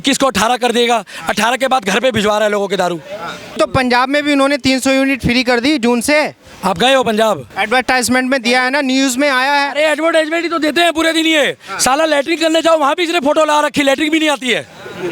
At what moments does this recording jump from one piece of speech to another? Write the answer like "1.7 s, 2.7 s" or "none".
3.5 s, 7.5 s